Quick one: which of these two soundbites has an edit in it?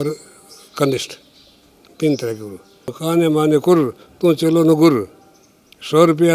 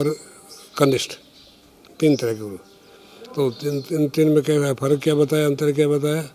first; 1 cut; at 3.0 s

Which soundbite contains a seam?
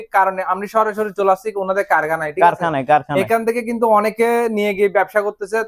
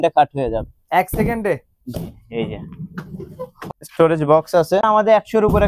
second; 2 cuts; at 3.6 s, 4.8 s

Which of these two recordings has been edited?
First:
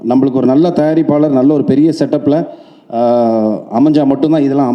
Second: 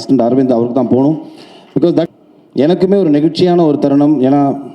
second; 1 cut; at 2.1 s

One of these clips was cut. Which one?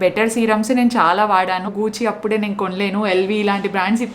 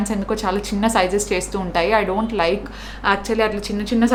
first; 1 cut; at 1.7 s

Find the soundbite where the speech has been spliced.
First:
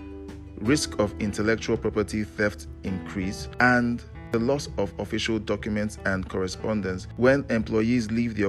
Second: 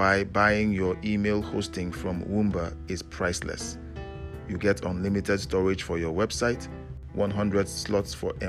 first; 3 cuts; at 3.4 s, 4.1 s, 7.1 s

